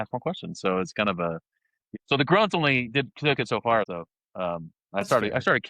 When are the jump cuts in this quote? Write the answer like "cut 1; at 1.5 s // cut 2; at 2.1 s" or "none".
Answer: cut 1; at 1.8 s // cut 2; at 3.9 s

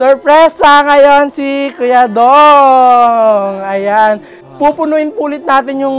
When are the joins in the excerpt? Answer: cut 1; at 4.3 s

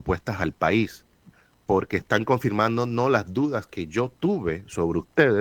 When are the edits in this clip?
none

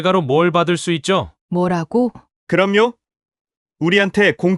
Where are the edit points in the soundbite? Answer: cut 1; at 1.4 s // cut 2; at 2.3 s

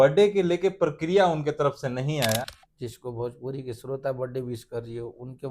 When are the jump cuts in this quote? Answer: cut 1; at 2.6 s

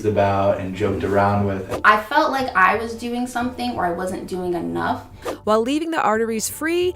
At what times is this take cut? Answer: cut 1; at 1.7 s // cut 2; at 5.3 s

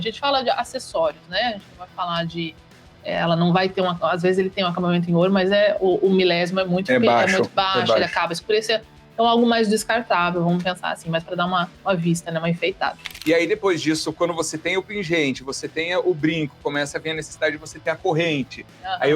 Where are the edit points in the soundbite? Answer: cut 1; at 13.1 s

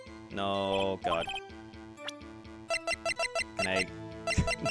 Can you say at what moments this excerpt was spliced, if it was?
none

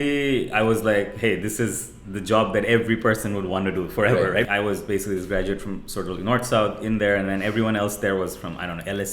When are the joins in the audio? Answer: cut 1; at 4.5 s

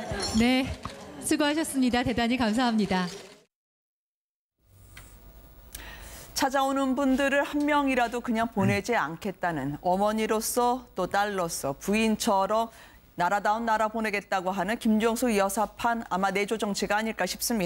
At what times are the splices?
cut 1; at 9.6 s

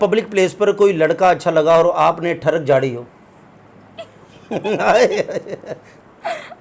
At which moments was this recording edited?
none

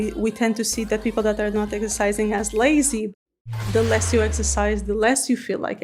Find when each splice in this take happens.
cut 1; at 3.4 s

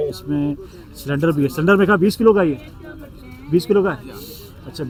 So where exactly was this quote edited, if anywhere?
none

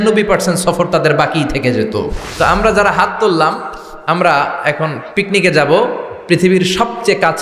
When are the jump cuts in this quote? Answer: cut 1; at 2.2 s

